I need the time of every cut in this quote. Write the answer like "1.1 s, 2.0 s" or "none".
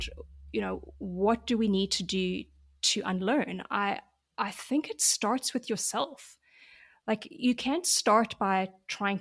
none